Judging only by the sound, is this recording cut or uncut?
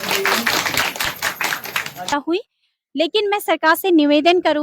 cut